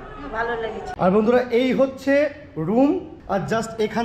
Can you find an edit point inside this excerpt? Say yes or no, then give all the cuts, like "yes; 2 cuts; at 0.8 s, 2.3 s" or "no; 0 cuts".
yes; 2 cuts; at 0.8 s, 3.1 s